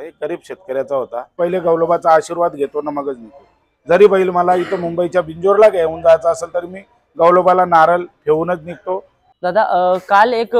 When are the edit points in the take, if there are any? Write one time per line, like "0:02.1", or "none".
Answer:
0:01.3
0:09.1